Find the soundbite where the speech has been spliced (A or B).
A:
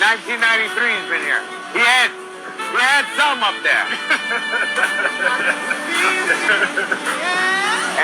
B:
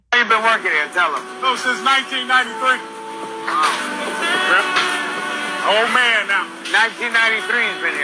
A